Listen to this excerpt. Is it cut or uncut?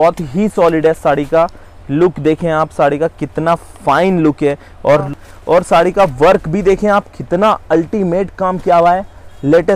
cut